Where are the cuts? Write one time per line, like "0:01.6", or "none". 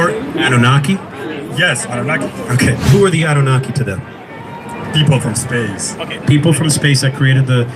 0:02.9